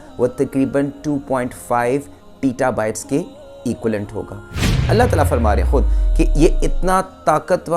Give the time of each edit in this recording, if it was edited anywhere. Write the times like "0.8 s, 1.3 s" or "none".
4.6 s